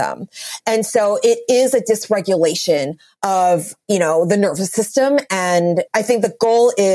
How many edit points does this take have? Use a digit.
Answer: 2